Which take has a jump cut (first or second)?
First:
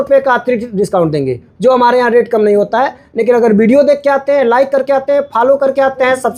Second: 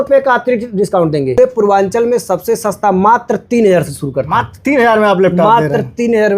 second